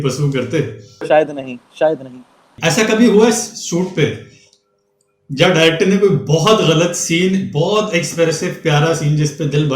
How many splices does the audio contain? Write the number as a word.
two